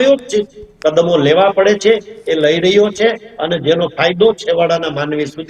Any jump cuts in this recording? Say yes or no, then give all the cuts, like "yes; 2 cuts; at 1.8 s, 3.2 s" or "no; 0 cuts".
no; 0 cuts